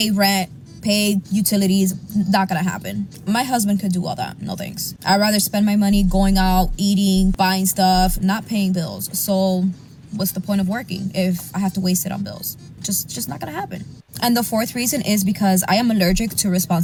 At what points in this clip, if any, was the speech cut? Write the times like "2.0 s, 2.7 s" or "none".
none